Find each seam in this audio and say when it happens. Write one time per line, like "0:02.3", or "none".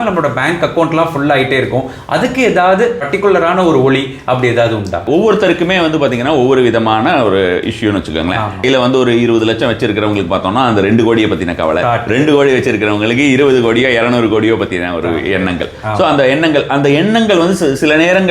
0:03.0
0:05.0
0:08.6